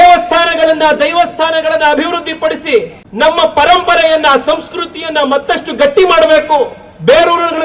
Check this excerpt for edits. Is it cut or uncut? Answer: cut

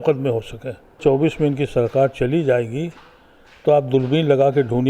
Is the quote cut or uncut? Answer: cut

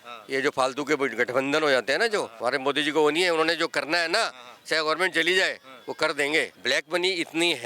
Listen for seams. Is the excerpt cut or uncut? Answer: cut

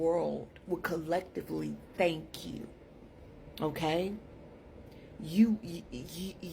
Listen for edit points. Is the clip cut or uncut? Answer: uncut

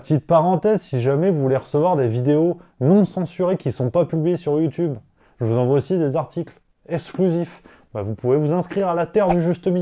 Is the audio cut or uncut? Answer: uncut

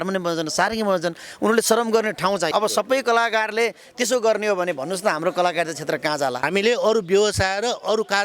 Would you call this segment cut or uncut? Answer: cut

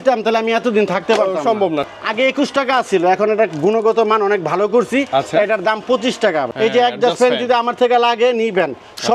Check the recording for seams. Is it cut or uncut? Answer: cut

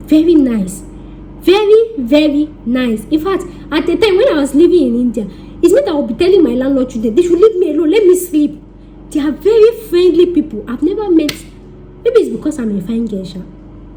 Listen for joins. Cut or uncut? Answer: uncut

